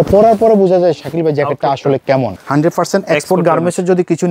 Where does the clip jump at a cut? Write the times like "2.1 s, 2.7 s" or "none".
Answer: 2.4 s